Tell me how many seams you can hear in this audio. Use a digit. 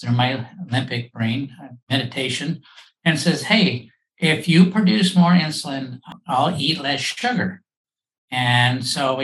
1